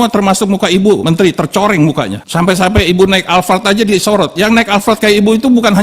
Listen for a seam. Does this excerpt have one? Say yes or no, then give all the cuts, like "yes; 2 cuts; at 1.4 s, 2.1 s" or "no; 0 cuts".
yes; 2 cuts; at 1.0 s, 2.2 s